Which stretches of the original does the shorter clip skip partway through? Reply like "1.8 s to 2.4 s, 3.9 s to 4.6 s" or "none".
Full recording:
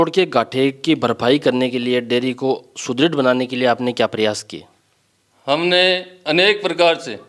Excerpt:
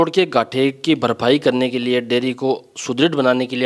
none